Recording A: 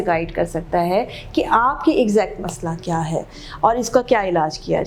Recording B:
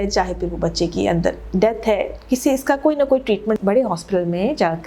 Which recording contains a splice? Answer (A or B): B